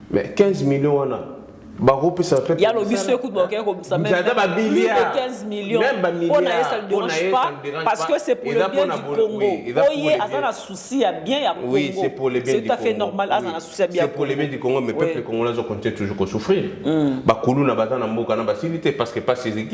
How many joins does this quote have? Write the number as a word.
zero